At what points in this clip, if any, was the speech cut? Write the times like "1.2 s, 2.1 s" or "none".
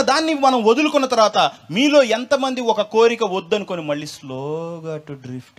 none